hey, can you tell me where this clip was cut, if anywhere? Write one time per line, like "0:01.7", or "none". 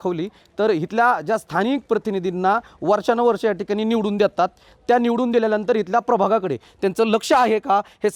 none

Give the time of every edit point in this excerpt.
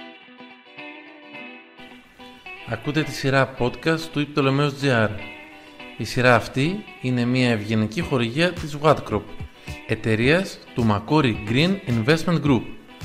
0:02.6

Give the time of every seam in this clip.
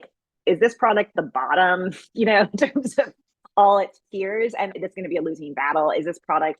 0:04.8

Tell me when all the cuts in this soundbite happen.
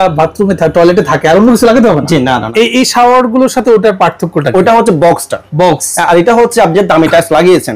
0:02.5

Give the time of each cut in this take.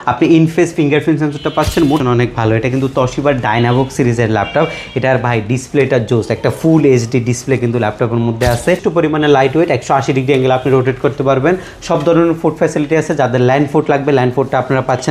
0:02.0
0:08.8

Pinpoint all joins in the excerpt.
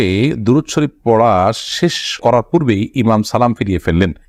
none

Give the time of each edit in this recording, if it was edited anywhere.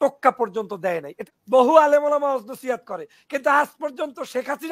0:01.1

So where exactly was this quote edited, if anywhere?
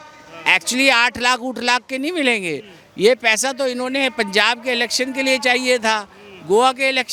none

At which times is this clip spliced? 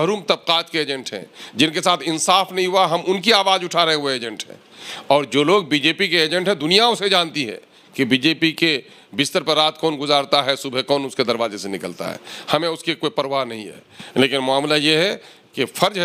none

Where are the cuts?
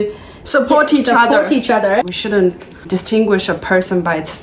0:02.1

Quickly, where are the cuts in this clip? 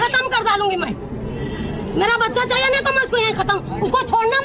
none

